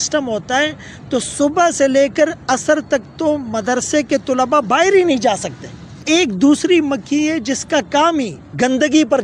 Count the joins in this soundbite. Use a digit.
1